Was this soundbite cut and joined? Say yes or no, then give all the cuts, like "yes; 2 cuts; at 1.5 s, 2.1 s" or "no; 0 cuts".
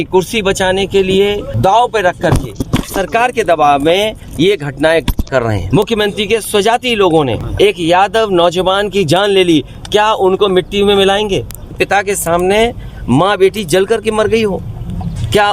yes; 4 cuts; at 1.5 s, 5.6 s, 7.4 s, 11.8 s